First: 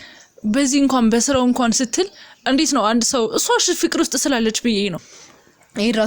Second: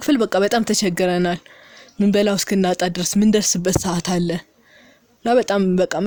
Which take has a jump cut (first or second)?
first